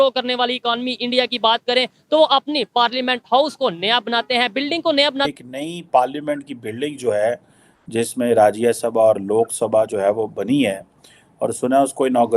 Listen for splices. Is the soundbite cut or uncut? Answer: cut